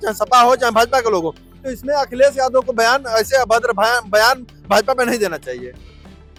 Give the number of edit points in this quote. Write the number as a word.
zero